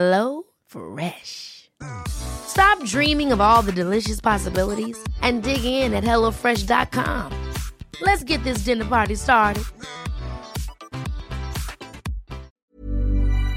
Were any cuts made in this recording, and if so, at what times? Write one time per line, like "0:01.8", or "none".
0:12.5